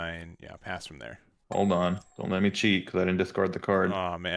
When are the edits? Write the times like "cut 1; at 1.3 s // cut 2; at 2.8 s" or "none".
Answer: cut 1; at 1.3 s // cut 2; at 2.1 s